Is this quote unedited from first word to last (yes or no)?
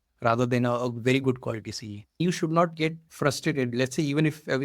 no